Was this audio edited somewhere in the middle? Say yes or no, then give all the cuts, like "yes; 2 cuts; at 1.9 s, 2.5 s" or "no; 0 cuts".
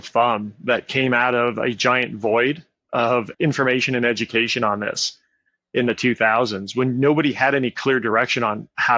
no; 0 cuts